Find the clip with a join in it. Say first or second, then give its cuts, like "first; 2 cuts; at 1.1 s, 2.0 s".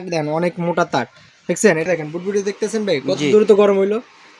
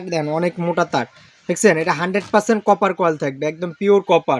first; 1 cut; at 1.9 s